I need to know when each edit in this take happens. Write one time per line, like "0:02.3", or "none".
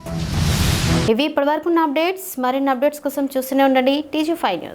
none